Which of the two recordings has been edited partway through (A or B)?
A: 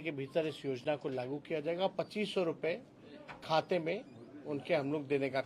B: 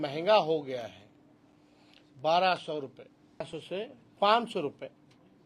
B